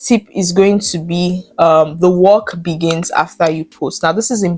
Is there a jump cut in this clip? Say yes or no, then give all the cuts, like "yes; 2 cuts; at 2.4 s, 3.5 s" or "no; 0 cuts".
no; 0 cuts